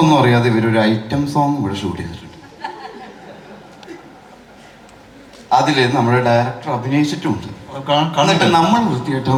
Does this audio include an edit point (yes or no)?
no